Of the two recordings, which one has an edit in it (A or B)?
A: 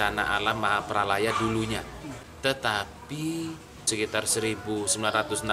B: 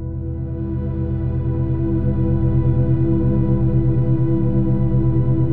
A